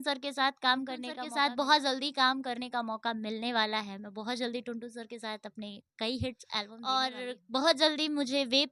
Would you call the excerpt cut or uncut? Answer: cut